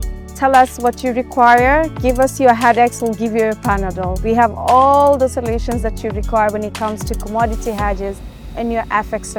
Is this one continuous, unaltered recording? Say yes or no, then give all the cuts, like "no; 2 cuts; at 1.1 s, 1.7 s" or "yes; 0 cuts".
yes; 0 cuts